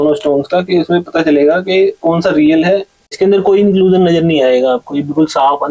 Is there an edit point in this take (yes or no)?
yes